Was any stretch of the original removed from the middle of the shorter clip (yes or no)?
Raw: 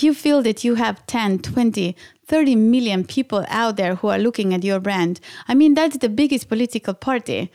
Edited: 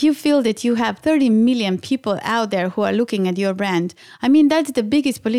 yes